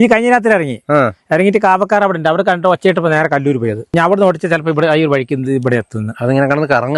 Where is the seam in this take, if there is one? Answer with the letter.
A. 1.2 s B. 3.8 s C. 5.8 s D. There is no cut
B